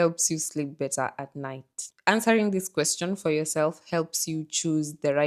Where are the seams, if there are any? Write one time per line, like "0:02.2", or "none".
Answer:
0:01.9